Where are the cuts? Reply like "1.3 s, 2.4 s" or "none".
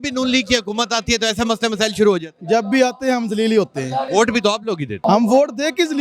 4.1 s, 4.9 s